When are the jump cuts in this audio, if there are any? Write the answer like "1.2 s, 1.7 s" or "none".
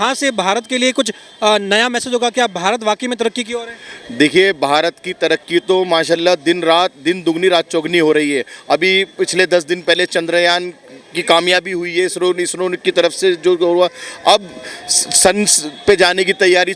none